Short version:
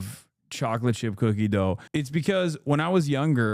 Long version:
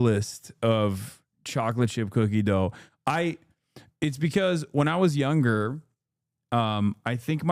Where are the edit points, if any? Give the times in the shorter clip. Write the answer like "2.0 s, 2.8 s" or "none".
1.8 s